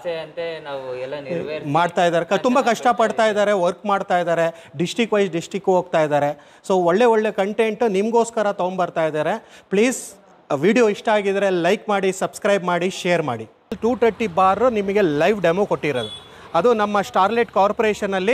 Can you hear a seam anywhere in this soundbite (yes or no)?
yes